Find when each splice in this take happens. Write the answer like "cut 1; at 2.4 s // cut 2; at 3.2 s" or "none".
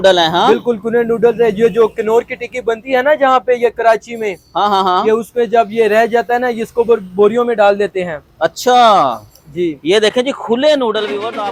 none